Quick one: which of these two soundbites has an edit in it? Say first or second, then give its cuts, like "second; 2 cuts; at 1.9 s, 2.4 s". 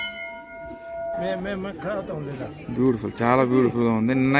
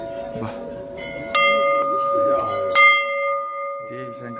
first; 1 cut; at 1.2 s